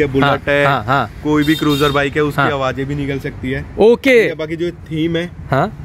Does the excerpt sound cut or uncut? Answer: uncut